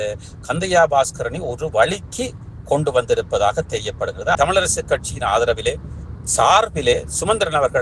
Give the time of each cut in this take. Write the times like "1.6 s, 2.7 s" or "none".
4.3 s

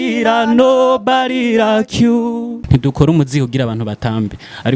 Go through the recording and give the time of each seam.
2.6 s

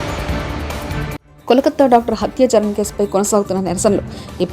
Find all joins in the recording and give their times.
1.3 s

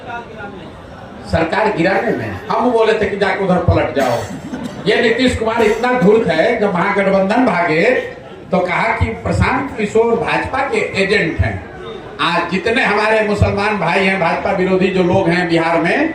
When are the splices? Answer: none

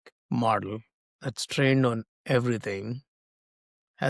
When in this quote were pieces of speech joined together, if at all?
none

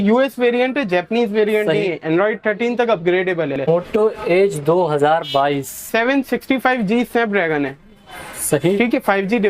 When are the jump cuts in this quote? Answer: 3.7 s, 5.8 s

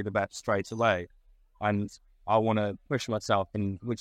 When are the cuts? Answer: none

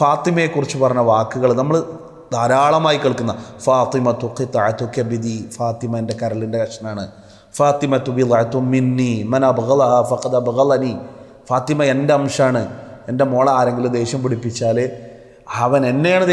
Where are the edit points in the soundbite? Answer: none

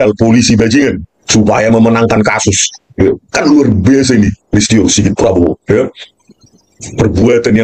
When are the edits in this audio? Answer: 1.1 s

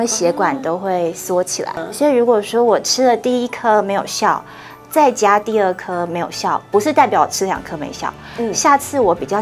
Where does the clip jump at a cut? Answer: 1.8 s

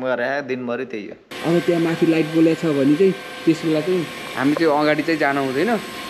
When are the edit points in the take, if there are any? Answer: 1.3 s

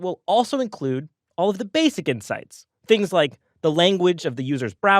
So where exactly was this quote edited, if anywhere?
1.9 s

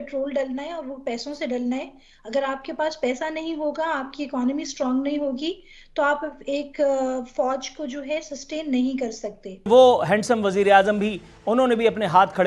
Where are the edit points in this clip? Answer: 9.7 s

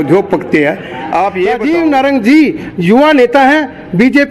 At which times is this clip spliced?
1.5 s

